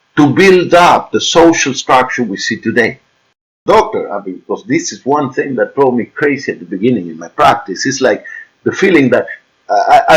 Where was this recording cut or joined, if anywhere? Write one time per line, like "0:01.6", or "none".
0:03.6